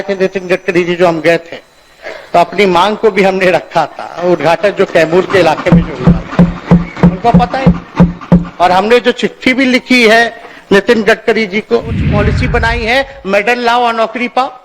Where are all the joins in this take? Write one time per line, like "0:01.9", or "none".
0:12.0